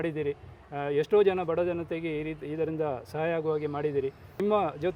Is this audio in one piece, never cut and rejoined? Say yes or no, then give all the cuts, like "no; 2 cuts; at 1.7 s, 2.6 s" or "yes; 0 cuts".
yes; 0 cuts